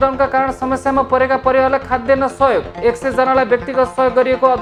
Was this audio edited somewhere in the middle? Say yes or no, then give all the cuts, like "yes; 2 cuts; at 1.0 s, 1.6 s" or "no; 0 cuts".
no; 0 cuts